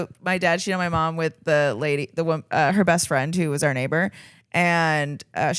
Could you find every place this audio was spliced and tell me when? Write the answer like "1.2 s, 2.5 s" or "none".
none